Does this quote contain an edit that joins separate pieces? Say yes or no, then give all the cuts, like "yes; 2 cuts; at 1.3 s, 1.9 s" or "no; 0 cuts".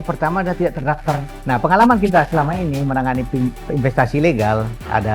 yes; 1 cut; at 1.3 s